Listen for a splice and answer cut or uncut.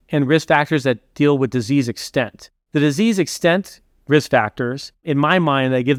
uncut